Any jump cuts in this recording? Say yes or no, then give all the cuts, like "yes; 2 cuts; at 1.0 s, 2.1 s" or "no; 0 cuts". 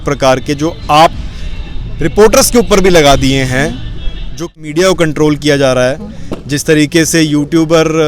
yes; 1 cut; at 4.5 s